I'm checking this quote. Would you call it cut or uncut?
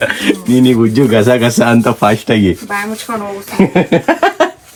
uncut